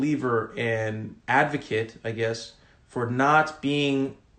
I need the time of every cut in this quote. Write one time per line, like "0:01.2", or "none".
0:01.1